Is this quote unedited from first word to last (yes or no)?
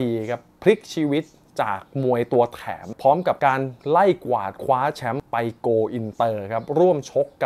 no